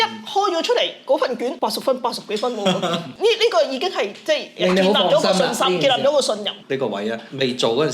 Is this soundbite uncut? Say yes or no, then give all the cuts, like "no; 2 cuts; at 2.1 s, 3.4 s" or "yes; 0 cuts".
no; 3 cuts; at 1.6 s, 3.1 s, 6.6 s